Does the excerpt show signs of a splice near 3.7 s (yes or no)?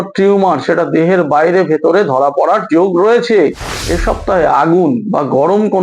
yes